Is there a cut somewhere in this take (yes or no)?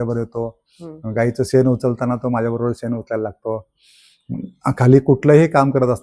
no